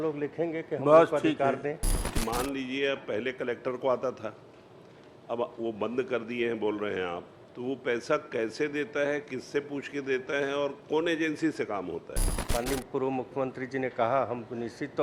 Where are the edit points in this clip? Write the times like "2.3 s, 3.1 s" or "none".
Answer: 2.1 s, 12.5 s